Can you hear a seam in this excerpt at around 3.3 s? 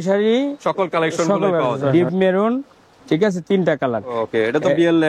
no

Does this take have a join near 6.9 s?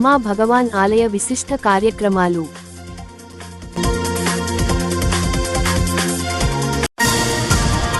yes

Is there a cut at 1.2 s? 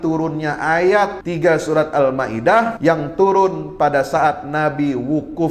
yes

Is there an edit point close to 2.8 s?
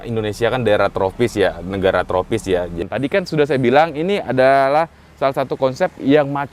yes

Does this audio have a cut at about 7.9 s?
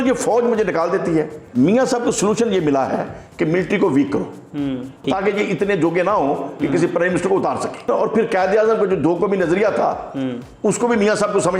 yes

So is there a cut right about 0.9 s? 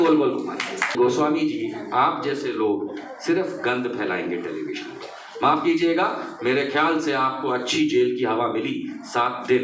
yes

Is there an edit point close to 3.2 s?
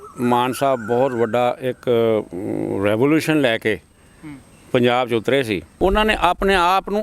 no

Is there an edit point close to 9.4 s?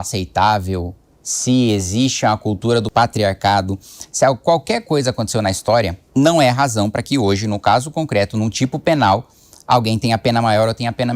no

